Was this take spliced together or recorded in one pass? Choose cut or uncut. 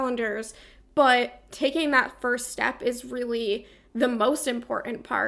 uncut